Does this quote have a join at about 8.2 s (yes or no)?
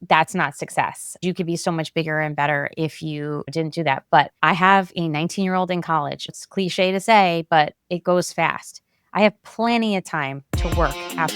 no